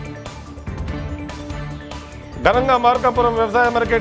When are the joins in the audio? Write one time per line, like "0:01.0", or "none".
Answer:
0:01.0